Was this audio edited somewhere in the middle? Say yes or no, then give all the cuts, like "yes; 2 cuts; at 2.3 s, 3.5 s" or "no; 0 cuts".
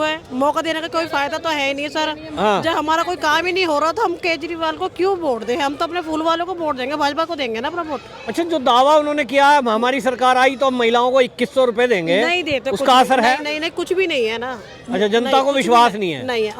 no; 0 cuts